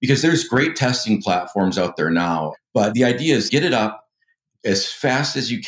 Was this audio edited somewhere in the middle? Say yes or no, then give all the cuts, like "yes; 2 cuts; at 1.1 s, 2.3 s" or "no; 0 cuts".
yes; 2 cuts; at 2.5 s, 3.5 s